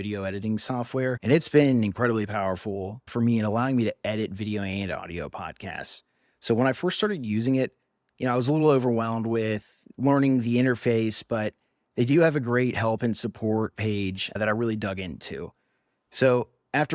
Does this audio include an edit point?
yes; 1 cut; at 1.2 s

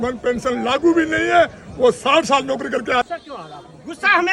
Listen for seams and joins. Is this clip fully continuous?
no; 1 cut; at 3.1 s

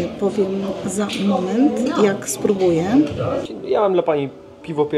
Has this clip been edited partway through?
yes; 1 cut; at 3.4 s

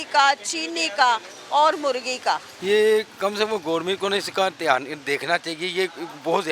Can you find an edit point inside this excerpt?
no; 0 cuts

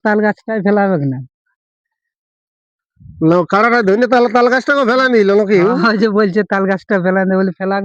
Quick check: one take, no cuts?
yes; 0 cuts

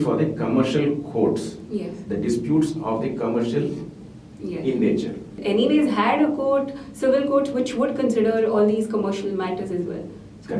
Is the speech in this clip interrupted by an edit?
yes; 1 cut; at 5.4 s

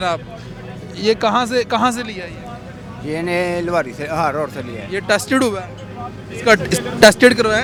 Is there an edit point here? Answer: no; 0 cuts

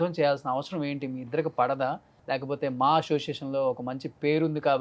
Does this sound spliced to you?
yes; 1 cut; at 2.1 s

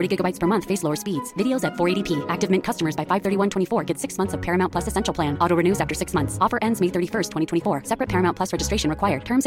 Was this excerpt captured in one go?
yes; 0 cuts

